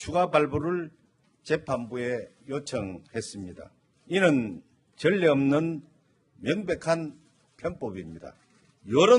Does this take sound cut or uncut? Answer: cut